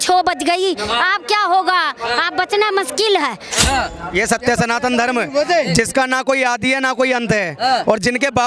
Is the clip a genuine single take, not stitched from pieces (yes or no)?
no